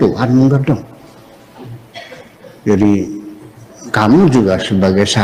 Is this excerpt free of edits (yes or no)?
yes